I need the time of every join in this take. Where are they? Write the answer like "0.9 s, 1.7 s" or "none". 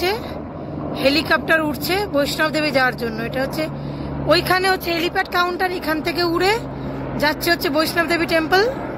none